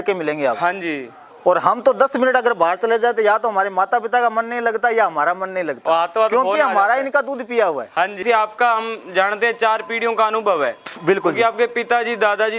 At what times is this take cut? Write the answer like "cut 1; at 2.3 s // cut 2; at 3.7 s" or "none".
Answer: cut 1; at 8.2 s